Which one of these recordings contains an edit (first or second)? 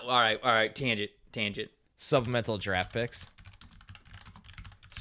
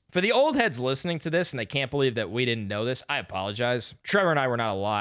second